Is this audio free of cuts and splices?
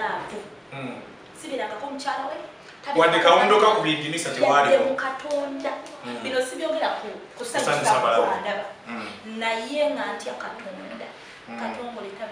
yes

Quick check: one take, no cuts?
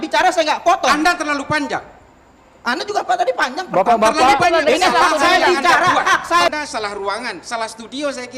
no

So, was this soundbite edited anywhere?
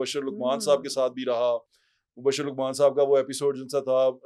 no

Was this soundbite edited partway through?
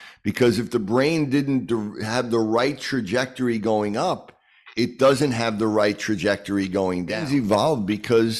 yes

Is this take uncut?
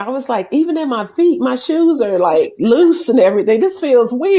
yes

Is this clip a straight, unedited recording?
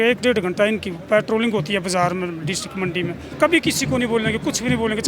no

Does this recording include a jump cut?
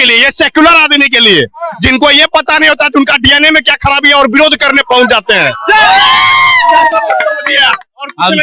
no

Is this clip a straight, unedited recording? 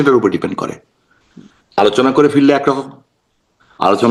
yes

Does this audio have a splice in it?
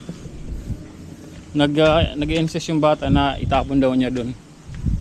no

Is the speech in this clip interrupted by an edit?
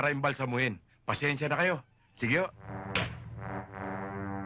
yes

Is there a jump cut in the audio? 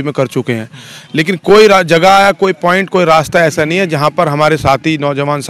no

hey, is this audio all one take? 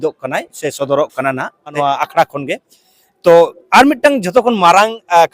no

